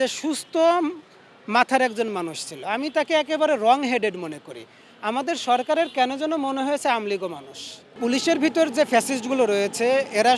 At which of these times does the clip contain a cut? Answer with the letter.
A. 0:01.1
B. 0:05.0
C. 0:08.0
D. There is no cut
C